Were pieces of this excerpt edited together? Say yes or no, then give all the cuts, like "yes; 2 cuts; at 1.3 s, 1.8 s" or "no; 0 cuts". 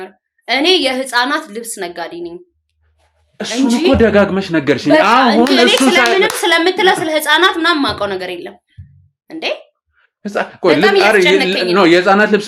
no; 0 cuts